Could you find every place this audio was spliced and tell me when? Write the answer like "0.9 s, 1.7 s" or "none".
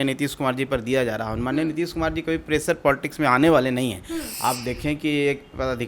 4.2 s